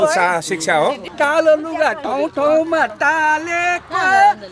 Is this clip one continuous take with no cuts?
no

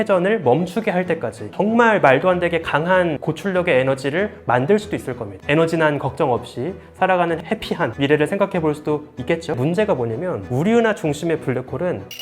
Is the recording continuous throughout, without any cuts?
no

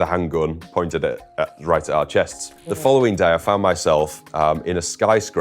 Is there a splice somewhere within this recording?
yes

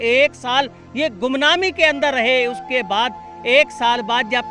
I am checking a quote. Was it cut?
no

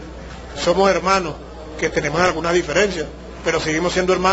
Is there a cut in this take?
no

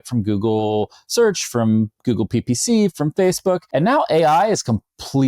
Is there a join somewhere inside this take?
yes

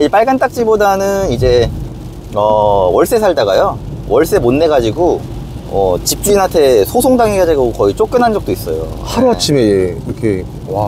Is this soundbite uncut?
yes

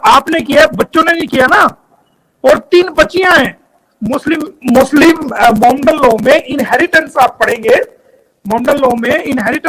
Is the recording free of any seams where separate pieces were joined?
yes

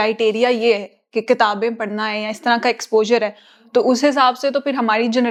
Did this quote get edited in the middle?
no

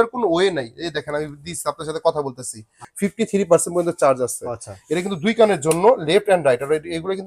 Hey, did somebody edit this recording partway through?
yes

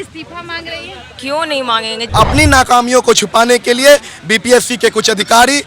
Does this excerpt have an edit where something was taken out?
yes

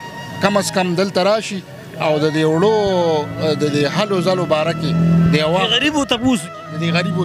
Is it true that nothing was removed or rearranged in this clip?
yes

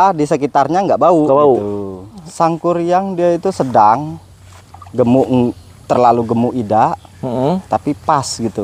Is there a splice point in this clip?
yes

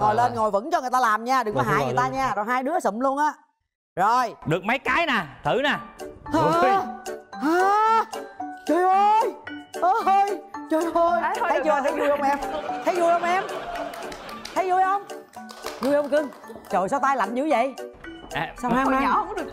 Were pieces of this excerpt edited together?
no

